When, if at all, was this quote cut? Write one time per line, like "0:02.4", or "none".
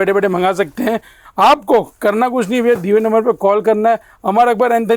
none